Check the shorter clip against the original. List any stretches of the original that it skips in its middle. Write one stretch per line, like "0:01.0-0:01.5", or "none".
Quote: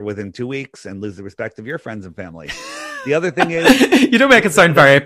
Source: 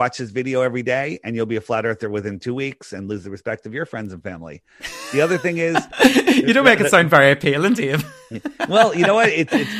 0:05.6-0:05.9

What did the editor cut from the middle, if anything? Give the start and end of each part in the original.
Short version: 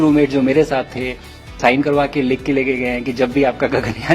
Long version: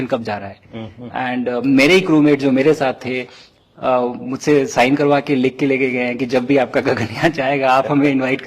0:03.7-0:04.7

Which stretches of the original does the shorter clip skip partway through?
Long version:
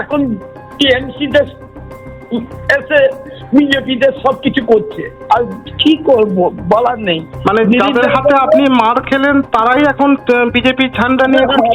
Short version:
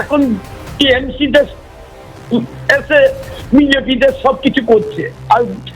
none

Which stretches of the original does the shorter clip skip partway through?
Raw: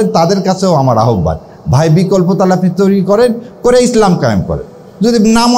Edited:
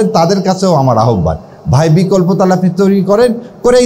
none

